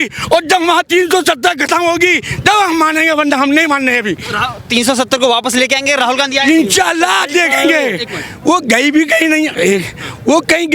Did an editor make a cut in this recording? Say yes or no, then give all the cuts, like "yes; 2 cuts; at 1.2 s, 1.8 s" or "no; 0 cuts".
no; 0 cuts